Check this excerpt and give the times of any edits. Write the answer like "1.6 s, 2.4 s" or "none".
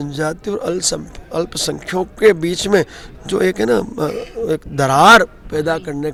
none